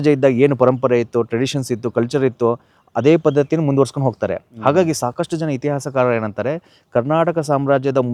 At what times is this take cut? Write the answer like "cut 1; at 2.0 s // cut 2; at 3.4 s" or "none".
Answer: none